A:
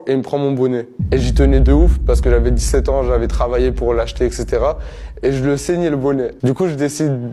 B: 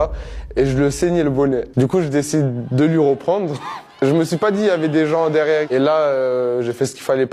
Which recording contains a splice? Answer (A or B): B